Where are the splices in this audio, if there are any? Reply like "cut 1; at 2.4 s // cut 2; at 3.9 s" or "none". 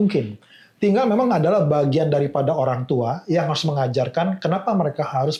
none